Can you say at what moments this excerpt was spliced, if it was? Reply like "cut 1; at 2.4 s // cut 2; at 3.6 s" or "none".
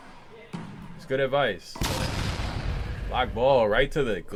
none